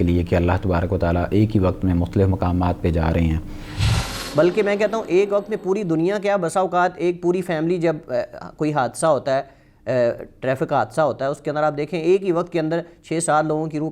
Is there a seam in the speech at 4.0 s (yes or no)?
yes